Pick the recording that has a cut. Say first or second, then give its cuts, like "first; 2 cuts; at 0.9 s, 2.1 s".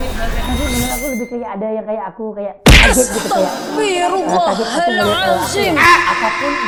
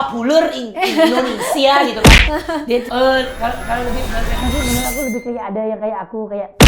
second; 1 cut; at 2.9 s